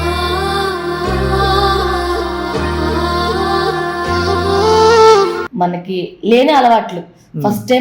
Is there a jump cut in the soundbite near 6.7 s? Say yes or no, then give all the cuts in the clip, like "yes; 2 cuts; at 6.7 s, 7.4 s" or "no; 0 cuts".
no; 1 cut; at 5.4 s